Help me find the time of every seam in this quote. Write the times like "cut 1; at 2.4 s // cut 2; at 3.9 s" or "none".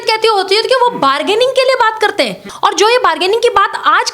cut 1; at 2.5 s

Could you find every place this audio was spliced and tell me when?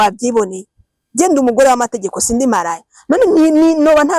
none

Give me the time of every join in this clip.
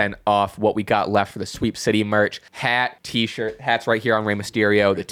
cut 1; at 2.7 s

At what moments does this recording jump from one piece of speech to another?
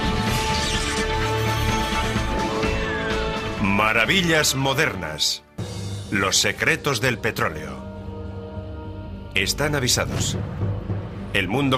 none

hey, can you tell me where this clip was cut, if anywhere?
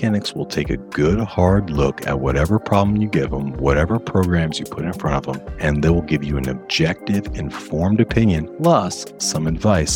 cut 1; at 5.5 s // cut 2; at 8.5 s

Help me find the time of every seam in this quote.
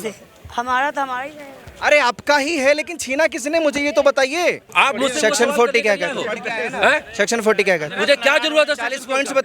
cut 1; at 4.7 s

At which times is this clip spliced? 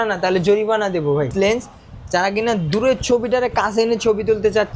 cut 1; at 1.3 s

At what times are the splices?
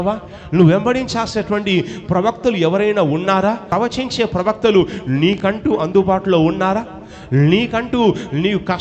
cut 1; at 3.7 s

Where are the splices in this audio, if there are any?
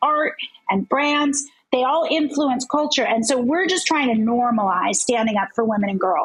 none

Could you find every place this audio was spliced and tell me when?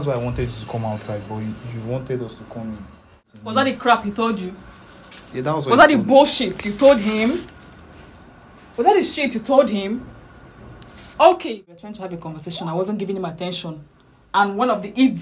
cut 1; at 3.3 s // cut 2; at 11.7 s

